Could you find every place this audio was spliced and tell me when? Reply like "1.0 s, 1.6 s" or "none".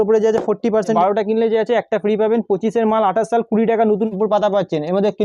0.9 s, 4.1 s